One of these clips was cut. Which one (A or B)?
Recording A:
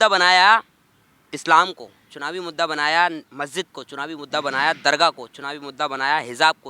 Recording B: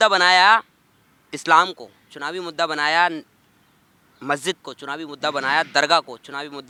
A